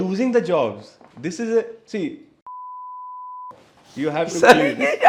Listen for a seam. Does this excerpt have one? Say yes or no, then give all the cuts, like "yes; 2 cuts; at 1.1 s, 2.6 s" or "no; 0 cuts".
no; 0 cuts